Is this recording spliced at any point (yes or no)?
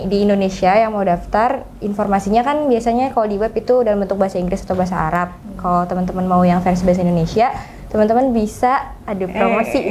no